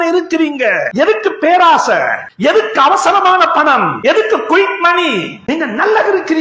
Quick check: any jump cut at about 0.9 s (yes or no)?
yes